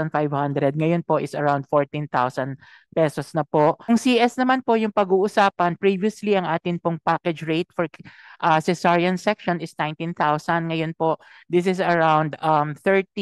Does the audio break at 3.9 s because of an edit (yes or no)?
yes